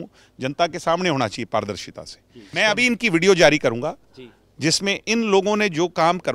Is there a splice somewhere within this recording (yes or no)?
yes